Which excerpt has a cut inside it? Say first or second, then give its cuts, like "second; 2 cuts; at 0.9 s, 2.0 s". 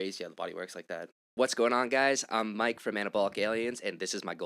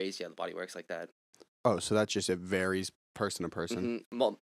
first; 1 cut; at 1.2 s